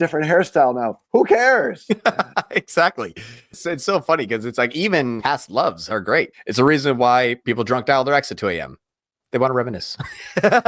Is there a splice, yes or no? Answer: yes